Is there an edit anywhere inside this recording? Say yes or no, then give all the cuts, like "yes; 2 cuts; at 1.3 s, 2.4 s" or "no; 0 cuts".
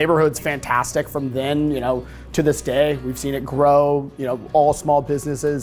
no; 0 cuts